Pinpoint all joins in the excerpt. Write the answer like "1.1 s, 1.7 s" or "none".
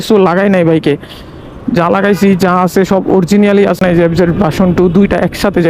3.8 s